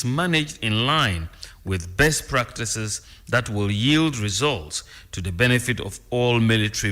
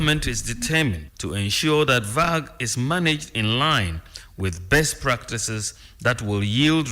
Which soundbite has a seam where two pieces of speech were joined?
second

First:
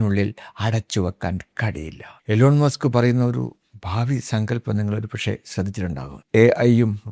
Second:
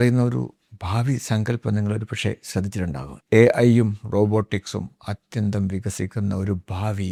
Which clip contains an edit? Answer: first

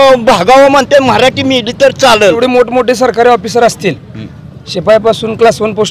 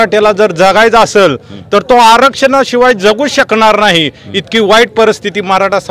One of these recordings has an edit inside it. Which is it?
first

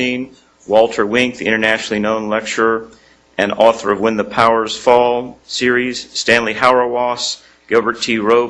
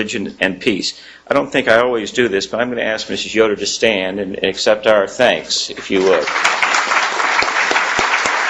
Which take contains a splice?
second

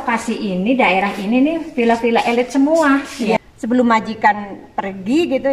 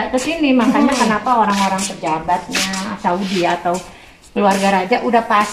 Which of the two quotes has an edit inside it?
first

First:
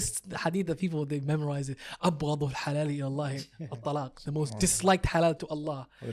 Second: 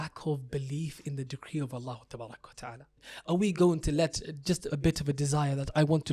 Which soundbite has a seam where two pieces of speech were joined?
second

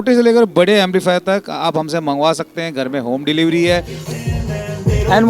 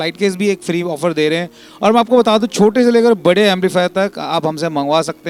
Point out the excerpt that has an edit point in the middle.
first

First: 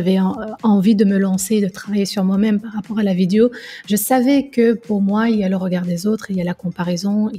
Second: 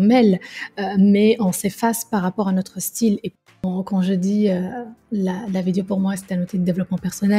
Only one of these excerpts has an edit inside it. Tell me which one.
second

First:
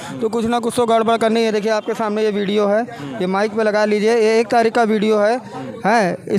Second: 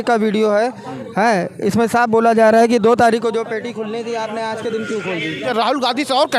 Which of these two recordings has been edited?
second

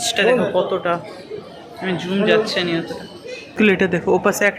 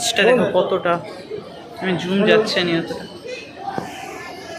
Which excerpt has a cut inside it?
first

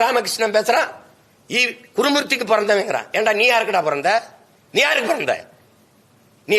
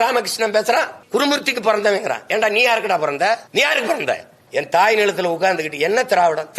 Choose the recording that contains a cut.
second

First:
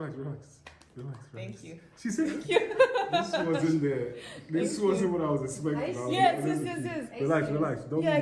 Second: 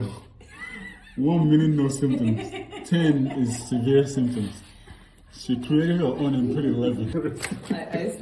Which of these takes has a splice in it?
second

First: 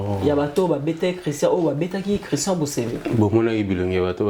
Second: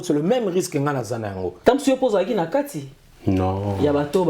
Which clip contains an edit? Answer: second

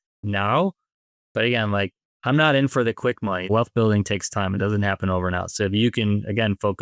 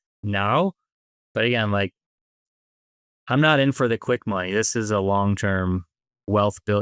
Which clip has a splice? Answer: first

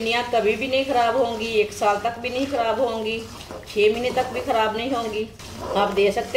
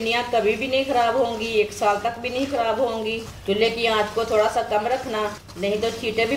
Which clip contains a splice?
second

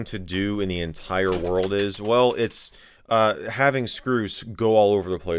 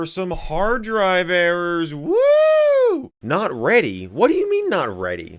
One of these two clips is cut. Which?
second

